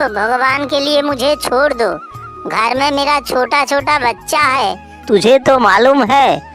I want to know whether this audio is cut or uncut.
cut